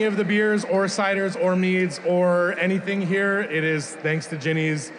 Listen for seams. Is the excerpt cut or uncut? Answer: uncut